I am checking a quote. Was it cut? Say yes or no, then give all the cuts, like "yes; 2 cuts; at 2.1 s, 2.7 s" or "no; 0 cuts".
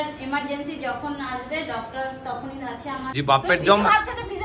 yes; 1 cut; at 3.1 s